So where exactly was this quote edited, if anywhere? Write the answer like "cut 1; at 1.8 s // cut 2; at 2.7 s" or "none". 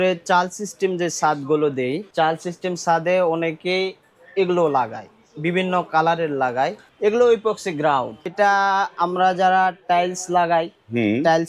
cut 1; at 2.1 s // cut 2; at 6.8 s // cut 3; at 8.3 s